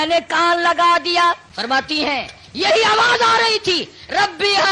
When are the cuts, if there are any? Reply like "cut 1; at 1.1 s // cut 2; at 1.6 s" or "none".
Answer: cut 1; at 1.5 s